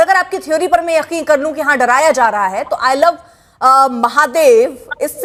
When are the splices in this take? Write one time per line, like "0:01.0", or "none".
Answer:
none